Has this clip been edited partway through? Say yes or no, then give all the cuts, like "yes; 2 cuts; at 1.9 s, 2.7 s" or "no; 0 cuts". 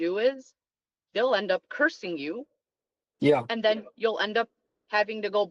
no; 0 cuts